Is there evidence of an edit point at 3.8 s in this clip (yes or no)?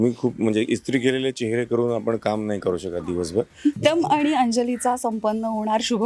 yes